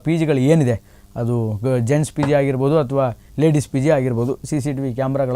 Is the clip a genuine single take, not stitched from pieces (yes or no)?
yes